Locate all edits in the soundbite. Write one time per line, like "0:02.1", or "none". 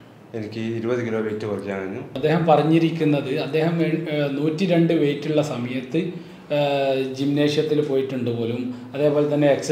0:02.0

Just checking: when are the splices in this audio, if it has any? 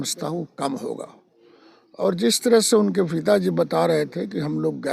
none

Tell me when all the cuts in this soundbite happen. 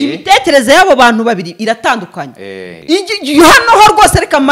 0:02.7

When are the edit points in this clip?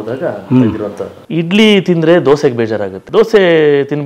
0:01.1
0:02.9

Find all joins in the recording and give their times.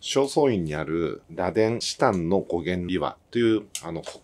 none

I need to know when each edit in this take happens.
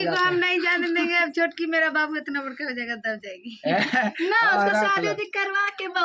none

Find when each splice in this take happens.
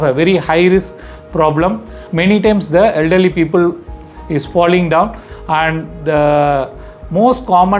0:02.0

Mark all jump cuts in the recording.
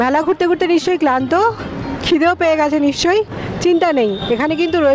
none

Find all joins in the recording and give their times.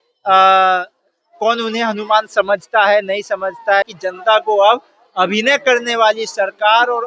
0:03.8

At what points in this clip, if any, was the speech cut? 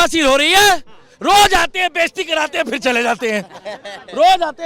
none

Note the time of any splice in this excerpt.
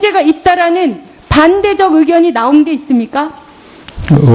0:02.1

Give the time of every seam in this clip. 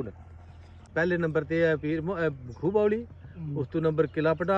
0:00.9

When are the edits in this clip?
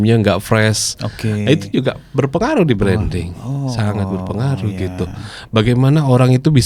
none

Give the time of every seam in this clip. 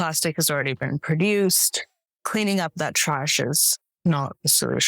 0:01.9

